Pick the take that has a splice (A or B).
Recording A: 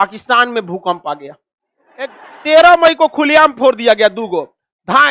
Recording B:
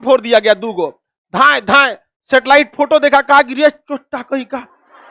A